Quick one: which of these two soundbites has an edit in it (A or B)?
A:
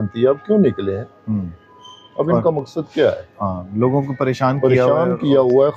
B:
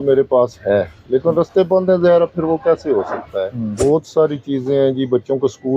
B